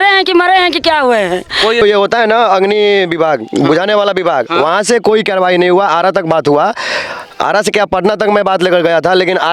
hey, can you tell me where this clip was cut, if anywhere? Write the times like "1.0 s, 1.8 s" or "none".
1.8 s